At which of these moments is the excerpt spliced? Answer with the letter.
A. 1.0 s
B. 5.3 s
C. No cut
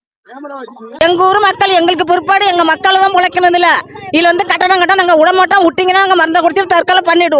A